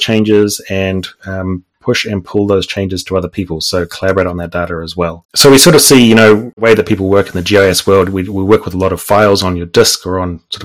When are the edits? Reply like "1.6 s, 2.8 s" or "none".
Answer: 5.2 s, 6.6 s